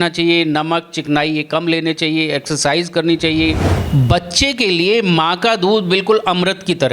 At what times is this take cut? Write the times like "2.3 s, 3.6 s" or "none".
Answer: 3.8 s